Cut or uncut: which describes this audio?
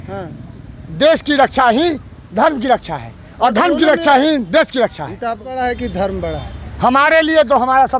cut